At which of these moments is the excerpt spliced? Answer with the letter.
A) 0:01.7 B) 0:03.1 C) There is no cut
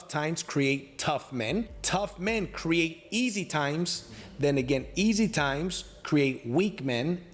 A